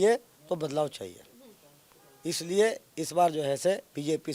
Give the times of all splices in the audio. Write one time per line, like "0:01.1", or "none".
none